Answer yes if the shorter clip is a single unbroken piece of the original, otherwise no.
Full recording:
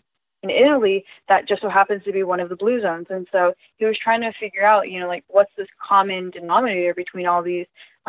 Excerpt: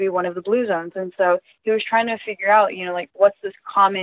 yes